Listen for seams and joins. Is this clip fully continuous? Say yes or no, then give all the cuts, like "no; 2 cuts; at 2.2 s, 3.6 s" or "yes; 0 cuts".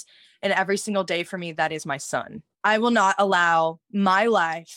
no; 1 cut; at 2.4 s